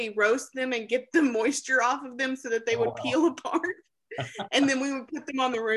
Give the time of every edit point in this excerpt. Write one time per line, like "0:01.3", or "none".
none